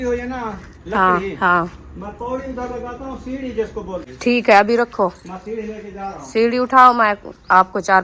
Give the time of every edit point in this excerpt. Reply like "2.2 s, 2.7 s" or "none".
4.0 s